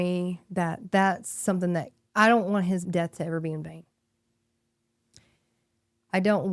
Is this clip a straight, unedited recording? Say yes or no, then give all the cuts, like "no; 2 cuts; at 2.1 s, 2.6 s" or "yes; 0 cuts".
no; 2 cuts; at 2.0 s, 2.8 s